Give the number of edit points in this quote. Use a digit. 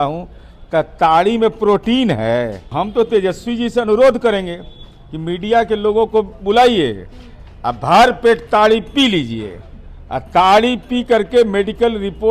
1